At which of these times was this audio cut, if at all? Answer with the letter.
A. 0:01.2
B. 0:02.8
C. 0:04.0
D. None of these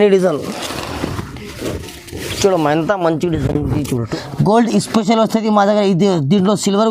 C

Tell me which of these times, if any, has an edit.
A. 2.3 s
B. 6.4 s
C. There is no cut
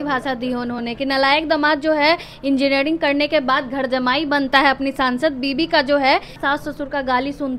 B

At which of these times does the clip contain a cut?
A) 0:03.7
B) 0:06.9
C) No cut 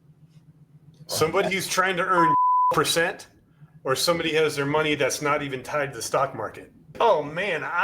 B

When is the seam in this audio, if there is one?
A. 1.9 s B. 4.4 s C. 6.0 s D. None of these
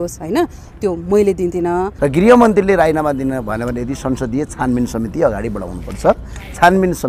A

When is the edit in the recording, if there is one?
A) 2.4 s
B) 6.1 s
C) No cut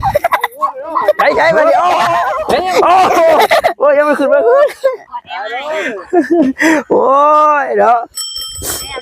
A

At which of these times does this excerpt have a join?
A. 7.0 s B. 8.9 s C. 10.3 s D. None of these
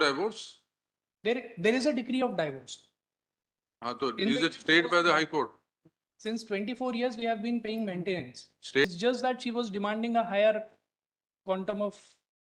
B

